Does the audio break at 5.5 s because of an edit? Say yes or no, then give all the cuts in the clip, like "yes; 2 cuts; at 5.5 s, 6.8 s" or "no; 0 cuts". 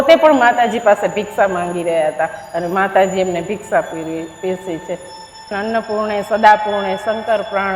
yes; 1 cut; at 5.5 s